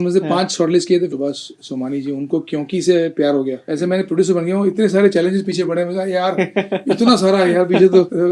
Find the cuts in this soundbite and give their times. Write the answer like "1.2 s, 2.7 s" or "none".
1.1 s, 3.7 s